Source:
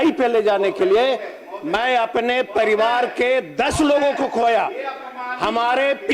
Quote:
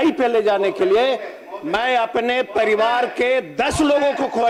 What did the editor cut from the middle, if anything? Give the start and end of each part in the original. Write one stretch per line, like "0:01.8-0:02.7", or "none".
none